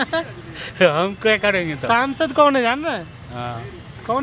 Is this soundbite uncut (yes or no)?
yes